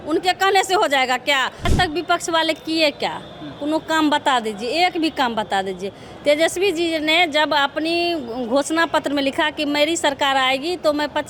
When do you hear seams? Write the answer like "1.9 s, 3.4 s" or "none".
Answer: 1.7 s